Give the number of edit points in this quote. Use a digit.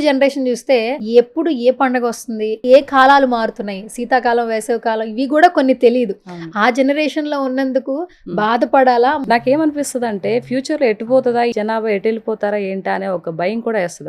4